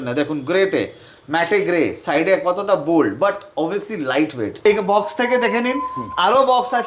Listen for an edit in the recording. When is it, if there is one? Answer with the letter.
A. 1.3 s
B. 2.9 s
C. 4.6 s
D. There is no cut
C